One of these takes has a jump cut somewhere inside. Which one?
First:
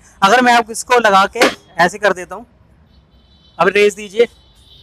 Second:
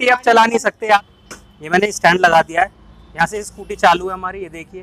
second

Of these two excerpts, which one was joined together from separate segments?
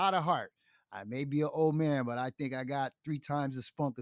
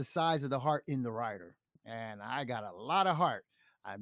second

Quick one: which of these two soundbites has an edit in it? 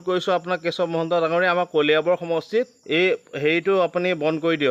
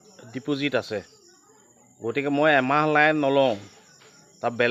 first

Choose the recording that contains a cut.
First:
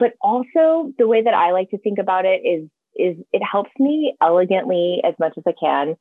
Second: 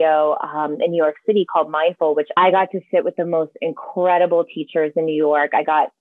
second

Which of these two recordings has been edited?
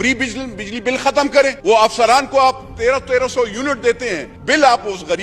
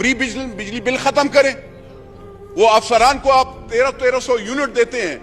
first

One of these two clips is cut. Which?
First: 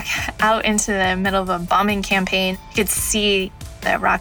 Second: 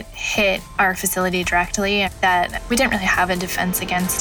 first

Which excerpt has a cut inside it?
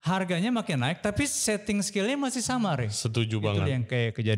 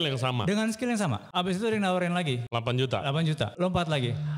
second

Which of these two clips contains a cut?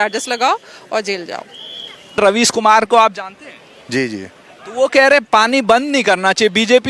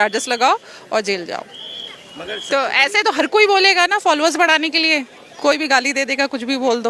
first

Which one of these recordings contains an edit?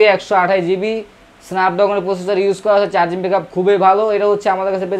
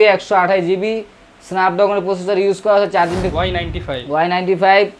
second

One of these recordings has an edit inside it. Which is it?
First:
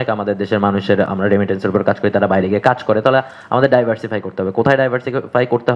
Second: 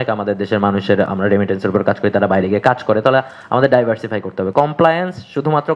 second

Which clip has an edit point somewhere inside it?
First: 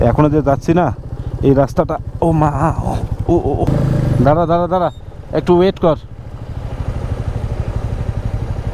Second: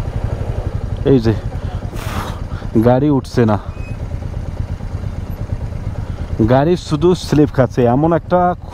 first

